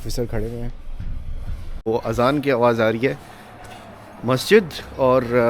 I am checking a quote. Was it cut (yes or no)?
yes